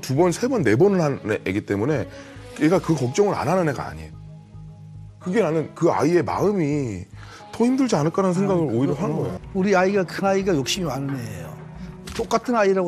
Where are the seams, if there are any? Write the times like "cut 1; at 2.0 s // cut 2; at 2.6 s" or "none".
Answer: cut 1; at 9.4 s